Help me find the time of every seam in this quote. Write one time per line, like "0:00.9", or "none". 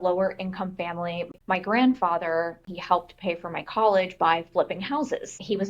0:01.2
0:02.7